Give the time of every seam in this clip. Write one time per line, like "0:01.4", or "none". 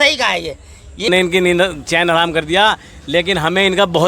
0:01.1